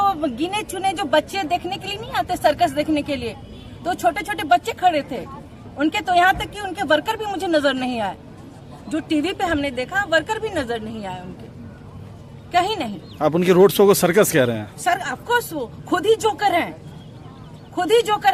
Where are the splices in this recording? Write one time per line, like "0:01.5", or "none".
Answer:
none